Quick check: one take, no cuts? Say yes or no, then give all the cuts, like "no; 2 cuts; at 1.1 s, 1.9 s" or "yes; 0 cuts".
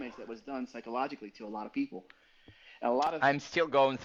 yes; 0 cuts